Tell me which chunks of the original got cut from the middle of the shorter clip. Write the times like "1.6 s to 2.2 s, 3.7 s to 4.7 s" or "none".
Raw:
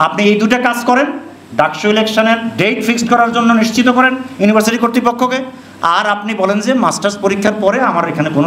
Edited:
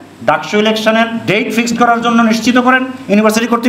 none